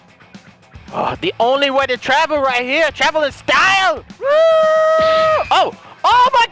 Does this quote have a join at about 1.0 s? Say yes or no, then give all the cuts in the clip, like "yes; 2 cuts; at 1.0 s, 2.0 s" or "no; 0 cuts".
no; 2 cuts; at 4.1 s, 5.5 s